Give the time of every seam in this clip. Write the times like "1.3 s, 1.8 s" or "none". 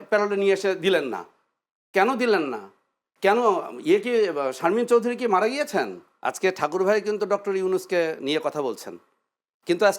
6.0 s

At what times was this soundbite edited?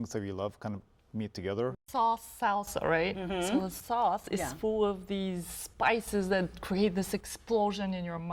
1.8 s

